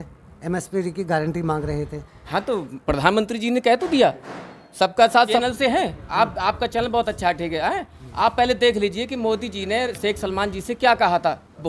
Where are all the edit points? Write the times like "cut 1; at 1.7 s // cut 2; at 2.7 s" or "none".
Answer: cut 1; at 5.4 s